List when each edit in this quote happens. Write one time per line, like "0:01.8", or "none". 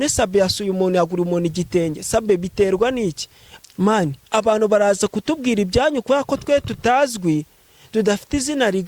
0:03.4